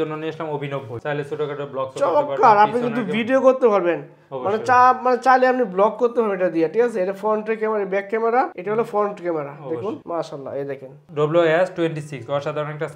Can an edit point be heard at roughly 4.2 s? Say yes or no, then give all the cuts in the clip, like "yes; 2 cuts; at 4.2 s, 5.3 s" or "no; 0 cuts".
no; 2 cuts; at 1.0 s, 11.1 s